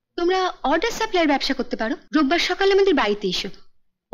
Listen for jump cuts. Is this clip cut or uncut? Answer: cut